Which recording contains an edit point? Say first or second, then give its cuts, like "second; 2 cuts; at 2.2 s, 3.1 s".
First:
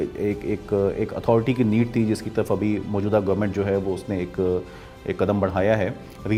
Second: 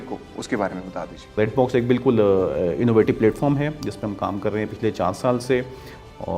second; 1 cut; at 1.4 s